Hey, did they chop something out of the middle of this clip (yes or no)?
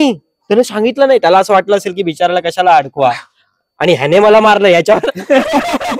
no